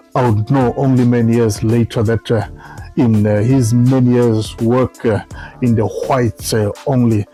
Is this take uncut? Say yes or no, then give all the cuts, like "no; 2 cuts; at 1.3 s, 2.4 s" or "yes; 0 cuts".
yes; 0 cuts